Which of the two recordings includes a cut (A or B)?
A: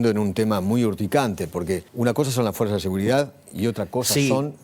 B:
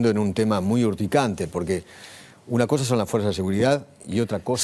A